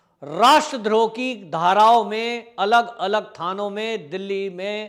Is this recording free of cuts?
yes; 0 cuts

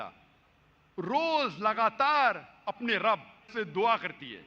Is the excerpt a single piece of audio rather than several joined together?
no; 1 cut; at 3.5 s

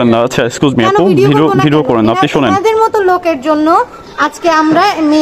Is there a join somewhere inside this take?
no; 0 cuts

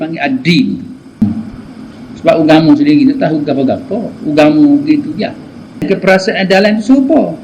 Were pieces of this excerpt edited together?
yes; 2 cuts; at 1.2 s, 5.8 s

